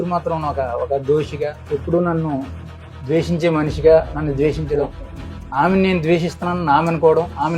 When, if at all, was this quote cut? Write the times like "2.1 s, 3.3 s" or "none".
1.6 s